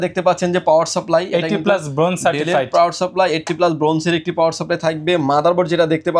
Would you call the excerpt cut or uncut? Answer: uncut